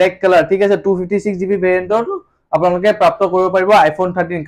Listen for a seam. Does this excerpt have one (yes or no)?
no